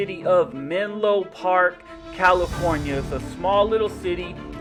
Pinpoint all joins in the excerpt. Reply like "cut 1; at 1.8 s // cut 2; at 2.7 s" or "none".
none